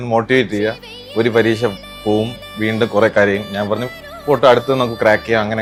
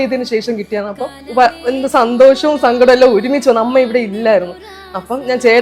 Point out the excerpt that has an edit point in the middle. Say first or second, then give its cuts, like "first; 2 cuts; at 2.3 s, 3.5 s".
second; 1 cut; at 1.1 s